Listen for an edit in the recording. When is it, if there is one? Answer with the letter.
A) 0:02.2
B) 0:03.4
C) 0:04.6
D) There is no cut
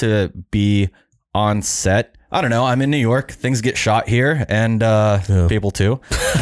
A